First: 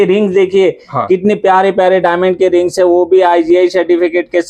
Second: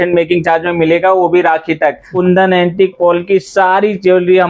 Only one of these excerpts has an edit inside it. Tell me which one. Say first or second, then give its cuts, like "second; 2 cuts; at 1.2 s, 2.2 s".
second; 2 cuts; at 2.1 s, 3.0 s